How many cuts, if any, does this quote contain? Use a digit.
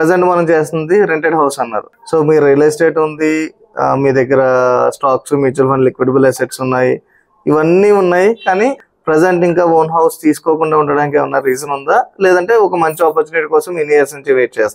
1